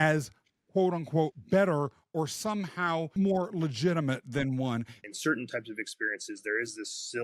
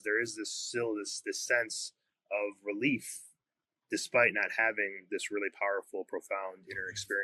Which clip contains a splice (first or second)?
first